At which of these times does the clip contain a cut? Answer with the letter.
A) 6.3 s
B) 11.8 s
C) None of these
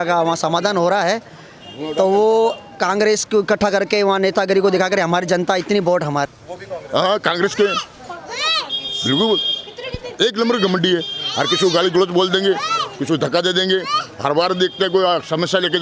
A